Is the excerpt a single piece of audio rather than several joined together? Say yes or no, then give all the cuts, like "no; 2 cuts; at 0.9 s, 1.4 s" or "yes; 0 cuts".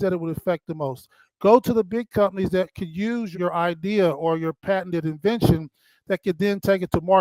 no; 1 cut; at 3.3 s